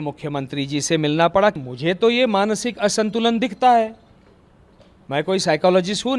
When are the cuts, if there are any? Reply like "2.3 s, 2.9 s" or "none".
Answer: 1.6 s